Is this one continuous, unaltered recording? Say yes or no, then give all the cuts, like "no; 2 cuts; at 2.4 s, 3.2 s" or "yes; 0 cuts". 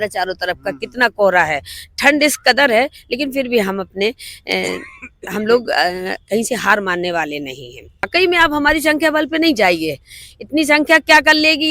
no; 1 cut; at 8.1 s